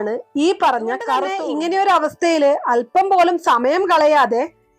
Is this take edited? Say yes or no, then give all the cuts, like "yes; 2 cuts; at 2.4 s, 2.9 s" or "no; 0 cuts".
yes; 1 cut; at 1.4 s